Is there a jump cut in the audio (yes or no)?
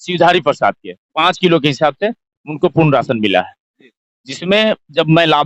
no